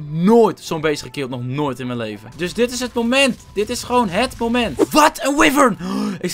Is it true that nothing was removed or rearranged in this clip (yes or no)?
no